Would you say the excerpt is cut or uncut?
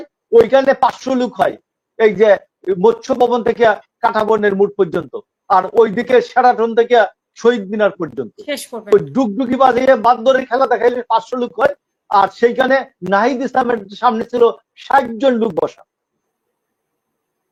uncut